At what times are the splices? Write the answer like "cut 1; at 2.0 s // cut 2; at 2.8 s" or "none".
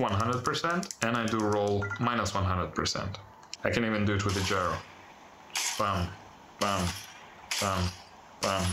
cut 1; at 0.9 s // cut 2; at 3.4 s